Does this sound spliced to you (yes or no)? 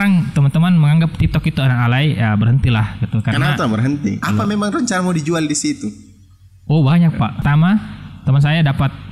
yes